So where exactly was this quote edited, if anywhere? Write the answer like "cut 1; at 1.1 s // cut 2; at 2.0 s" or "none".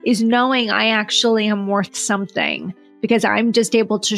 none